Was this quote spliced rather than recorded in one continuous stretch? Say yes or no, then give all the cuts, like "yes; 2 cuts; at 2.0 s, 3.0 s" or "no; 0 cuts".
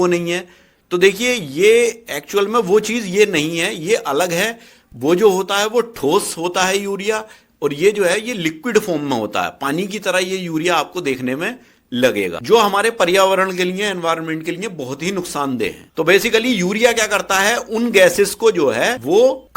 yes; 1 cut; at 12.4 s